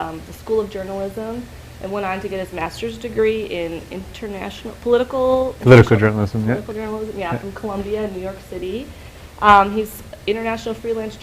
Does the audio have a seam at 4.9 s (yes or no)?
yes